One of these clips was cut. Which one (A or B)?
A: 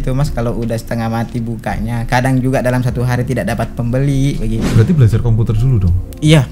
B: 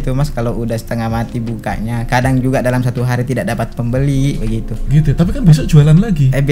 A